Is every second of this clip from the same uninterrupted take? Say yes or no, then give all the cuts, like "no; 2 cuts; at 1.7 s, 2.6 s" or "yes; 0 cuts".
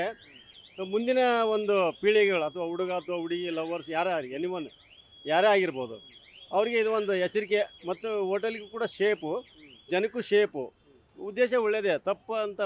yes; 0 cuts